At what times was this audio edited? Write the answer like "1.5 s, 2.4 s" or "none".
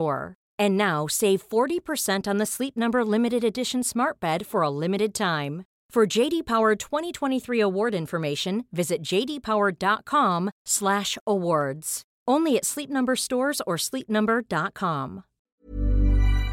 15.5 s